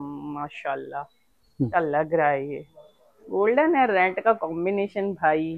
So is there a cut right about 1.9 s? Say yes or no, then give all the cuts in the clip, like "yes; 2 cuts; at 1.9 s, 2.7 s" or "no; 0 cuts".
no; 0 cuts